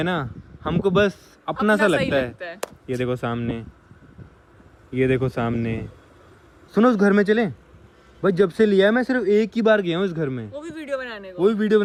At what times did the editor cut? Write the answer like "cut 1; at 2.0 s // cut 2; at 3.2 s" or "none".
none